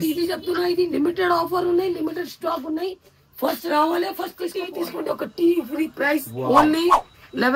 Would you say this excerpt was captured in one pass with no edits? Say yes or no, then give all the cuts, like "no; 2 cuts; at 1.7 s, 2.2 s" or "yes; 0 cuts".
no; 1 cut; at 4.6 s